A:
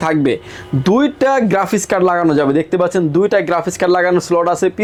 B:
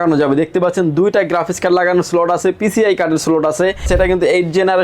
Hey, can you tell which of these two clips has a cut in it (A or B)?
B